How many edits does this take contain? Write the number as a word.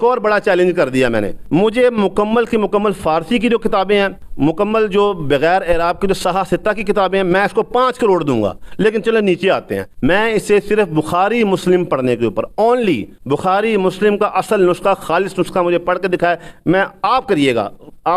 four